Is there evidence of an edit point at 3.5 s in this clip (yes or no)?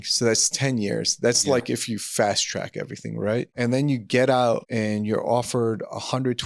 yes